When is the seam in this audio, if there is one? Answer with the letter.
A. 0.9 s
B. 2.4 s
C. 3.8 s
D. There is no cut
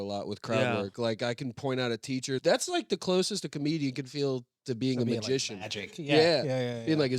B